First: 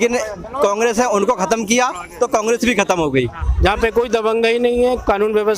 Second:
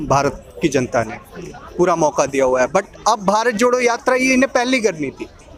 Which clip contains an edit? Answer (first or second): first